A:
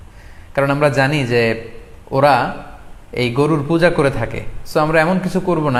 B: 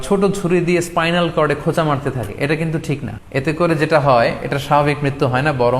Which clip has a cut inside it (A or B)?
B